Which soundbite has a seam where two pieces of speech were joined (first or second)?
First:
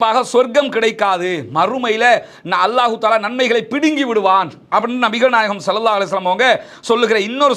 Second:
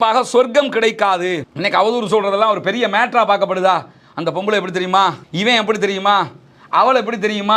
second